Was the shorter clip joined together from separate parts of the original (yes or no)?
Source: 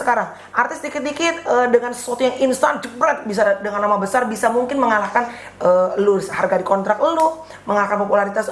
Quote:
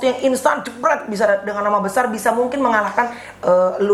no